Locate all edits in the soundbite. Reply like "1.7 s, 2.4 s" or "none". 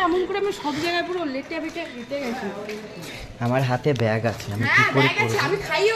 none